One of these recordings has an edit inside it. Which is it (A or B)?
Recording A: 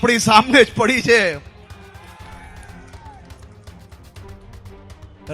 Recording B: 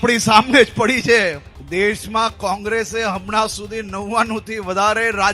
B